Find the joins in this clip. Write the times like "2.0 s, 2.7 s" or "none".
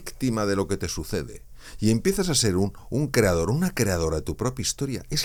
none